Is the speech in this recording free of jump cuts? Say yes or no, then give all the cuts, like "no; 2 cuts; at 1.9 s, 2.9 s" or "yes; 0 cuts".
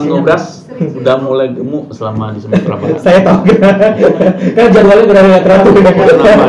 yes; 0 cuts